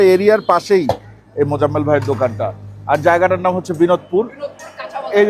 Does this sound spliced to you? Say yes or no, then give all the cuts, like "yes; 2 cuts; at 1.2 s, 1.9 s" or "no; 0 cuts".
no; 0 cuts